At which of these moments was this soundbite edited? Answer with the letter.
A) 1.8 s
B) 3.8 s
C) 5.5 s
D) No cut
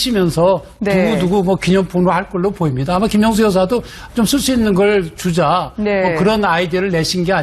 C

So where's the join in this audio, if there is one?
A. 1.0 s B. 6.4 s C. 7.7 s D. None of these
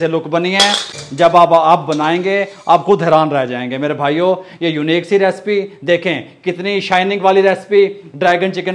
A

